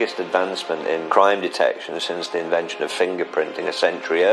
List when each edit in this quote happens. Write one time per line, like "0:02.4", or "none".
0:01.0